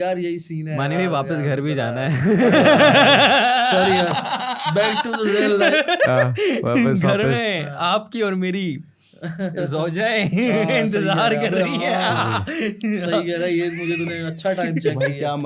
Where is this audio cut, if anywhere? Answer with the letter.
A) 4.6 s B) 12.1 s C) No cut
C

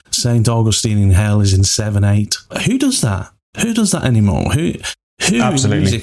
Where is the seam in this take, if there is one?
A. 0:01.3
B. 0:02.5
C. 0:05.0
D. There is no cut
B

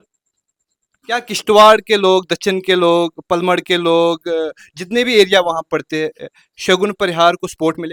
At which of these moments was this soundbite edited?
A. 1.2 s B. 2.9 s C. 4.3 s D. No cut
D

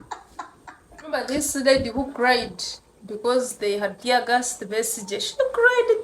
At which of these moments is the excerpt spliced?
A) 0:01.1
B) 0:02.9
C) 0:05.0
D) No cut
A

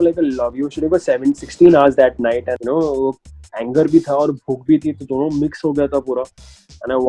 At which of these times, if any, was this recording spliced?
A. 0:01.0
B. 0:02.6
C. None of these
B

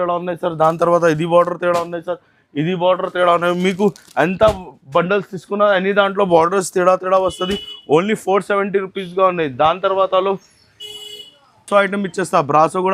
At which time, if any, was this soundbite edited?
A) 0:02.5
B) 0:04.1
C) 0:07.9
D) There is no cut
D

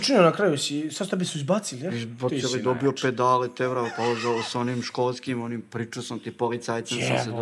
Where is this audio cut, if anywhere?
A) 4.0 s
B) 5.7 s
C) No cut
C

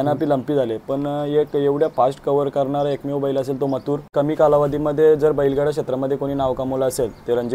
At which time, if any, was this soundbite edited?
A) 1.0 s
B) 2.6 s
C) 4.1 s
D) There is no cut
C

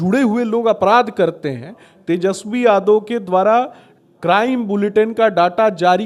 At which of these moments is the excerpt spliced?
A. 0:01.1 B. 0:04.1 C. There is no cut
C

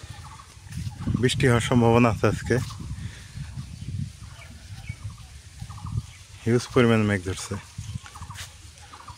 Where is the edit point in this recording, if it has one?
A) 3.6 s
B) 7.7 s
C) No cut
C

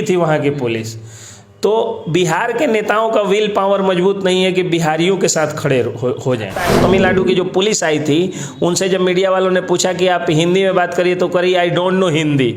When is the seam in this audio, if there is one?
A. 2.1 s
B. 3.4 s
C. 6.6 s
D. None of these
C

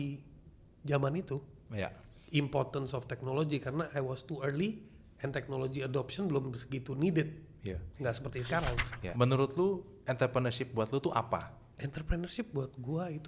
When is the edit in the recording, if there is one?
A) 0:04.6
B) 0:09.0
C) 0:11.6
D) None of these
B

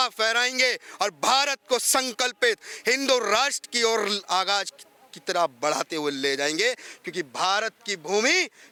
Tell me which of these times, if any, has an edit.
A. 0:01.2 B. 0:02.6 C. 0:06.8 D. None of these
D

